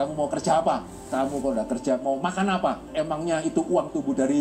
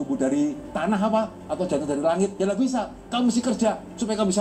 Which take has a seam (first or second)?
first